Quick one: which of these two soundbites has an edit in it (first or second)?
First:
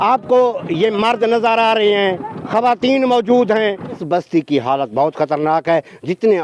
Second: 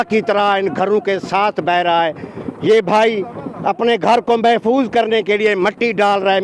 first